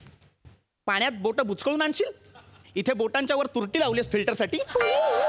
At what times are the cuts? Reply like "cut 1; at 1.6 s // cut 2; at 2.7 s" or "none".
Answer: none